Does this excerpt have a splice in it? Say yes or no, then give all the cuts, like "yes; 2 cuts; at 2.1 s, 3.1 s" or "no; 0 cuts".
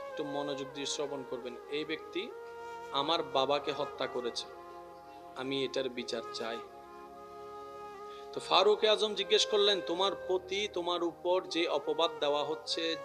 yes; 2 cuts; at 6.6 s, 8.1 s